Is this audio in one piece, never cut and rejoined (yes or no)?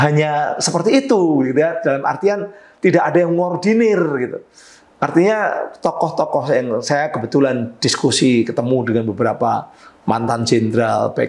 yes